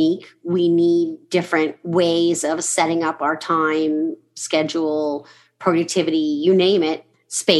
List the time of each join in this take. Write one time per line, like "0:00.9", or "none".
0:01.8